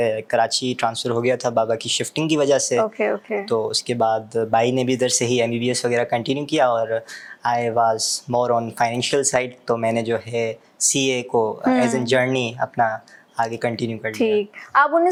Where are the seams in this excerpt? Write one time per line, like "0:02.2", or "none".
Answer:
none